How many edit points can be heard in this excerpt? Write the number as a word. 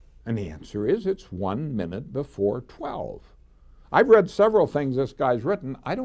one